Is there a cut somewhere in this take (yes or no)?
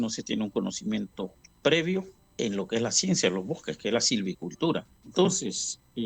yes